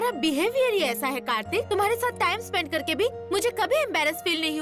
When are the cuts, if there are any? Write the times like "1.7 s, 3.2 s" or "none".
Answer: none